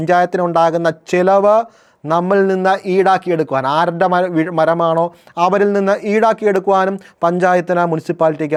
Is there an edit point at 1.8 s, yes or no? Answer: no